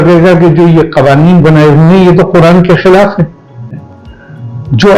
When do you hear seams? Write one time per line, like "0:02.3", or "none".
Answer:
0:03.9